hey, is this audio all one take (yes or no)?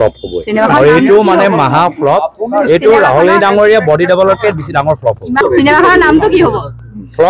no